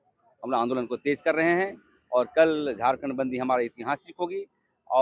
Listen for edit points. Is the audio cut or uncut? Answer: uncut